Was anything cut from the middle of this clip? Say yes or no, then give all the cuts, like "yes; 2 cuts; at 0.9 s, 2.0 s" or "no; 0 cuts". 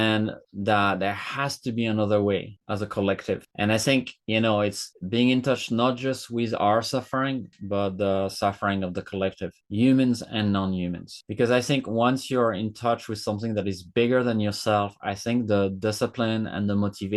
no; 0 cuts